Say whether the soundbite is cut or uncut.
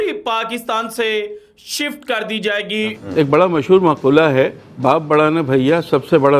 cut